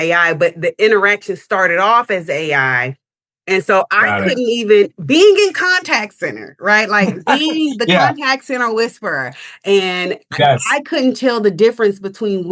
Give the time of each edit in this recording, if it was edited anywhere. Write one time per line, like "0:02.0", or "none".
none